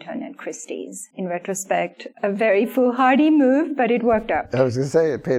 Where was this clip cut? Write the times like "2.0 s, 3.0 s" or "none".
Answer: 4.5 s